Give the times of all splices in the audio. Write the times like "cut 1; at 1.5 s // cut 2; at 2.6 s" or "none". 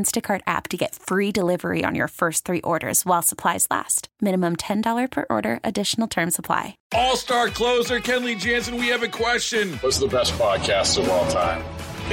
cut 1; at 6.8 s